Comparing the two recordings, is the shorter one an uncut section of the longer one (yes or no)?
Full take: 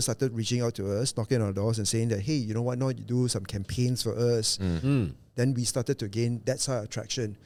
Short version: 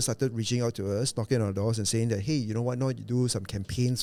yes